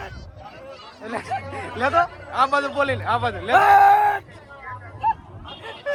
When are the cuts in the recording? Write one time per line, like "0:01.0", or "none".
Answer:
none